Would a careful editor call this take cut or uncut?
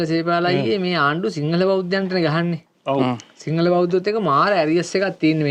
uncut